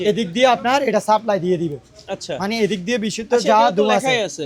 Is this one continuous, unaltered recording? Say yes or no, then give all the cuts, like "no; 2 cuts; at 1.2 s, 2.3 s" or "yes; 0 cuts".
yes; 0 cuts